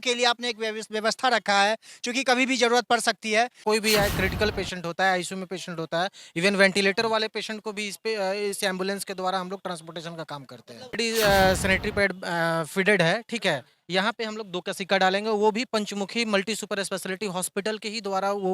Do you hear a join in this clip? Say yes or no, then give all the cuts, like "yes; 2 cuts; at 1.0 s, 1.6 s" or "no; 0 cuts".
yes; 2 cuts; at 3.6 s, 10.9 s